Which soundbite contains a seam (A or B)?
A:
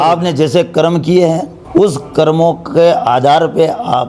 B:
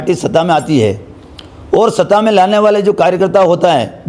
A